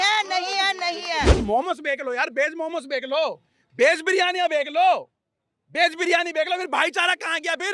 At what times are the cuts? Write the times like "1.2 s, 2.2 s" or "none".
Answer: 1.4 s